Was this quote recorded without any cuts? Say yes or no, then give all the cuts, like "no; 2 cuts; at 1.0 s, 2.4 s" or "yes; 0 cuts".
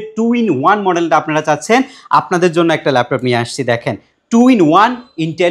yes; 0 cuts